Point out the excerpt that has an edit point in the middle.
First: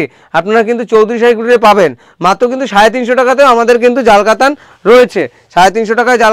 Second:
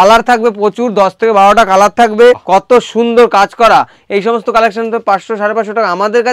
second; 1 cut; at 2.4 s

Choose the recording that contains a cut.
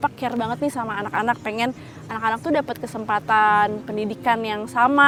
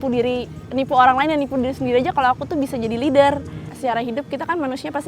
second; 1 cut; at 3.7 s

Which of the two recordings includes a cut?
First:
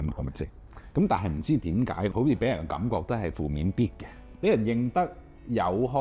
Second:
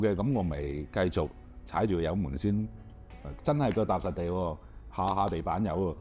first; 2 cuts; at 2.1 s, 4.3 s

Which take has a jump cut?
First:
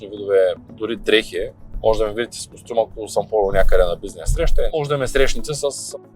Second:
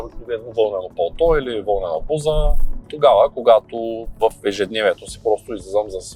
first; 2 cuts; at 1.6 s, 4.7 s

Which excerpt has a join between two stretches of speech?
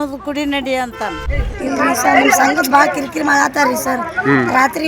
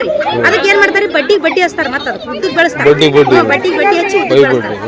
first; 1 cut; at 1.2 s

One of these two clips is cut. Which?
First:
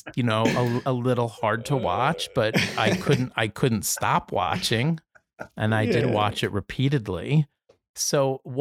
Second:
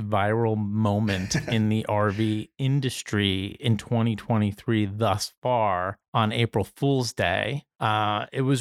second; 2 cuts; at 6.0 s, 7.6 s

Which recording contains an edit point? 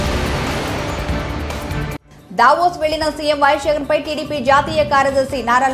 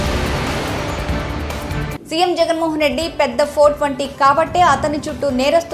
first; 1 cut; at 1.9 s

